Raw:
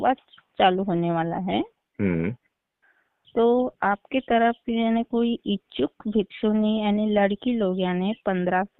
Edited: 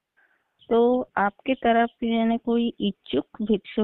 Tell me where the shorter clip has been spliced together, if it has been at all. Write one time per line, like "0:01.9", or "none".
none